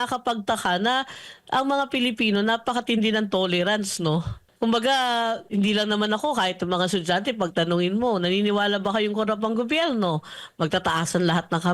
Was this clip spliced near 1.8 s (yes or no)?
no